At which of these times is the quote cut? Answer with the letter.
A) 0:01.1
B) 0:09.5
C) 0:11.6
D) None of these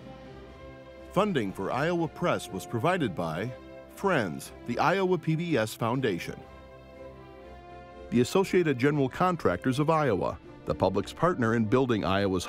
A